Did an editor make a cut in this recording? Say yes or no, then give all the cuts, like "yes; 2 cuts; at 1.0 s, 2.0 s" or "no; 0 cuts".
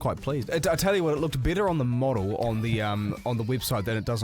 no; 0 cuts